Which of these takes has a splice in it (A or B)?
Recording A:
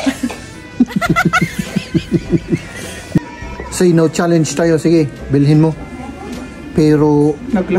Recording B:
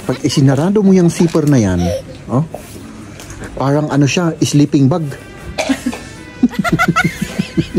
A